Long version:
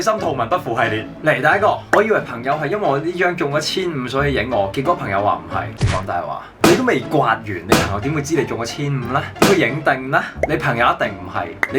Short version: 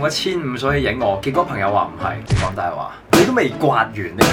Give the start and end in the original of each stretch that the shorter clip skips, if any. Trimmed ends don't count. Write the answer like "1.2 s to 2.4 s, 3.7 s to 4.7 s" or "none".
none